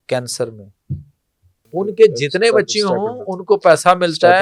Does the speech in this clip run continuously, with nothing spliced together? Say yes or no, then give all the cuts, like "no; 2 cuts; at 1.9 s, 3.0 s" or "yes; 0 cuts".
no; 1 cut; at 1.6 s